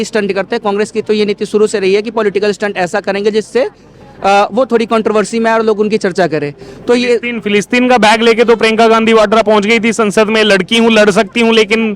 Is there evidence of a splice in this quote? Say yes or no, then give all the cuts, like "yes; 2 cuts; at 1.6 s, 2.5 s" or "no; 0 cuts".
no; 0 cuts